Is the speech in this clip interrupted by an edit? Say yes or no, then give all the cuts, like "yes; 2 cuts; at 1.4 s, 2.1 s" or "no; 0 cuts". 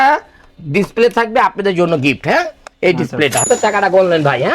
yes; 1 cut; at 3.5 s